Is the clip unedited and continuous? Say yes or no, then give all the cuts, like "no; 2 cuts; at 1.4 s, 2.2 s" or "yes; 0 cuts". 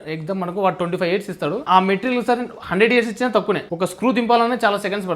no; 2 cuts; at 1.7 s, 3.7 s